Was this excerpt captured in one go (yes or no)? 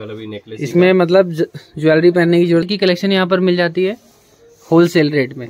no